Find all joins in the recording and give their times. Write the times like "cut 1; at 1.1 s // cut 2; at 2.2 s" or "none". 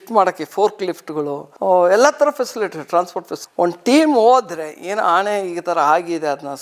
none